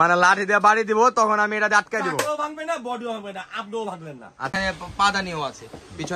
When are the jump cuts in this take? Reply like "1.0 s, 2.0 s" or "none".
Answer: 4.5 s